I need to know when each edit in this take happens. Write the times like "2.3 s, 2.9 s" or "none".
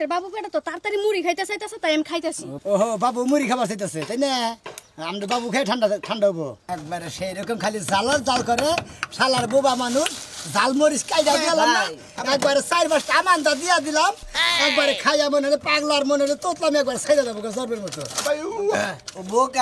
6.6 s